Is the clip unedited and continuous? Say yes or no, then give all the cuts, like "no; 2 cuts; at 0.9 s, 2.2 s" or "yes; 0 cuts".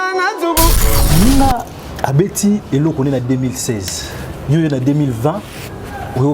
no; 1 cut; at 0.9 s